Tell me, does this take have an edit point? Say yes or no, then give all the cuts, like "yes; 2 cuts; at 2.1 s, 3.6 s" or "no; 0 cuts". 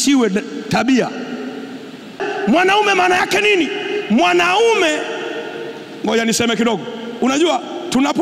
yes; 1 cut; at 2.2 s